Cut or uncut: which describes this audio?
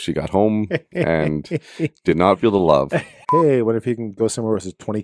cut